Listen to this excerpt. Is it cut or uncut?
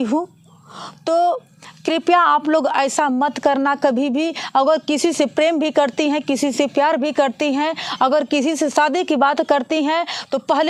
uncut